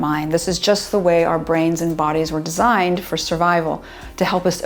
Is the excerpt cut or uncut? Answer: uncut